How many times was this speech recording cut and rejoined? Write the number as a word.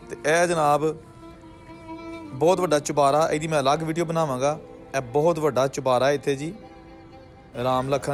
zero